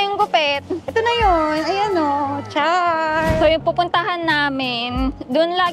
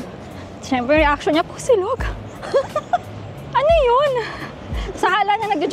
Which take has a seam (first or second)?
first